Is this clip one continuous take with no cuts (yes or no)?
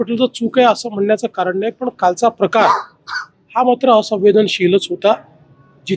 yes